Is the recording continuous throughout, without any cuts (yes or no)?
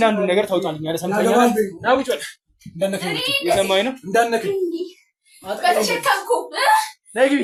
yes